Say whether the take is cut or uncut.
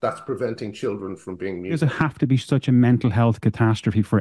cut